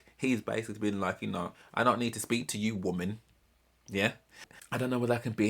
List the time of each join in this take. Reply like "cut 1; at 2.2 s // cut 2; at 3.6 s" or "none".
cut 1; at 4.4 s